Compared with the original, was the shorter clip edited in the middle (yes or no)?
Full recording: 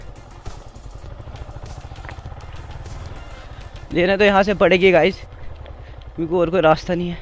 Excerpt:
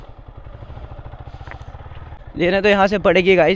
yes